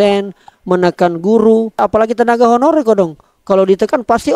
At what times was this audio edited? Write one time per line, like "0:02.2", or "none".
0:01.8